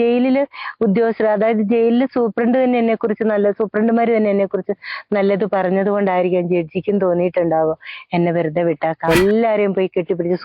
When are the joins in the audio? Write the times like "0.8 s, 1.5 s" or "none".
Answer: 9.1 s